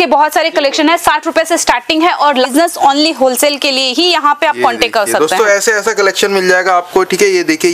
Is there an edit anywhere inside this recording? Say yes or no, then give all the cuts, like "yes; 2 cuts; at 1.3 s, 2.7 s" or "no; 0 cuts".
yes; 1 cut; at 2.5 s